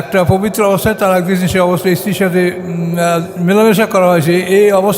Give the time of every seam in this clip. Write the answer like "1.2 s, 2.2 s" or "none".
none